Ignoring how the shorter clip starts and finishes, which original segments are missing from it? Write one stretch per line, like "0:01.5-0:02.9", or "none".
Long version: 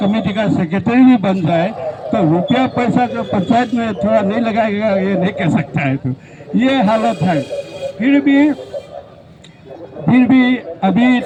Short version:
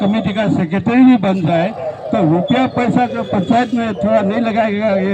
none